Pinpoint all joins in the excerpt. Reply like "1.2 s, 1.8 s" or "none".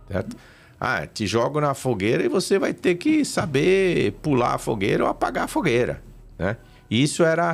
none